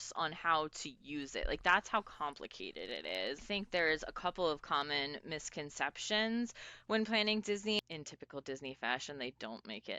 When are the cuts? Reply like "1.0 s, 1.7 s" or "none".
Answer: 3.4 s, 7.8 s